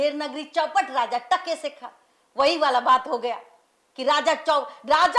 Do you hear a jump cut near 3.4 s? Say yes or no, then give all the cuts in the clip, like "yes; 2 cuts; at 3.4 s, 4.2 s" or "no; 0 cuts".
no; 0 cuts